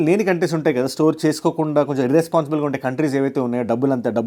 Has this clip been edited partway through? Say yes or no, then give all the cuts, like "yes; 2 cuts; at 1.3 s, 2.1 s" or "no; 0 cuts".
no; 0 cuts